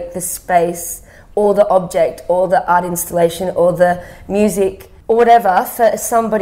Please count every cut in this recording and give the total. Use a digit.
1